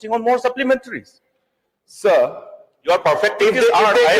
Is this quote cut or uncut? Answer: uncut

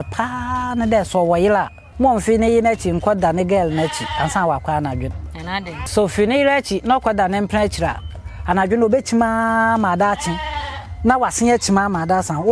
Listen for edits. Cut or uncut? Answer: cut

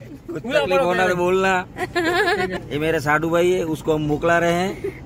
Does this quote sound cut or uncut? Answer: cut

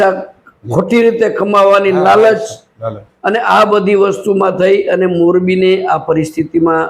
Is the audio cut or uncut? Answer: uncut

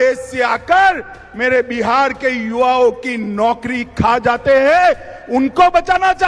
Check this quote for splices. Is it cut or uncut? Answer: uncut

